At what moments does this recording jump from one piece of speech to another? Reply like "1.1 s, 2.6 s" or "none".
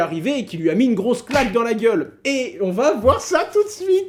none